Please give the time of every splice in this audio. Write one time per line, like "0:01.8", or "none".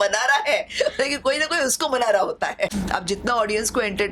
0:02.7